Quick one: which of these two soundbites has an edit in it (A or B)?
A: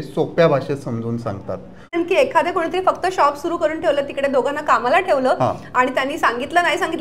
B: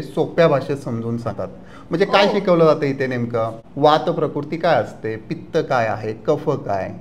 A